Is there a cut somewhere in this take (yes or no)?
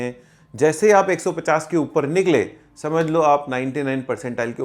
no